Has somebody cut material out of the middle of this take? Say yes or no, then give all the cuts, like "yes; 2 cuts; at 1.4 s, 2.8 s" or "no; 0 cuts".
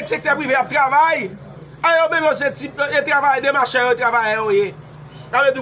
no; 0 cuts